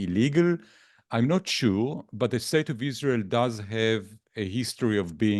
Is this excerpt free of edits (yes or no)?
yes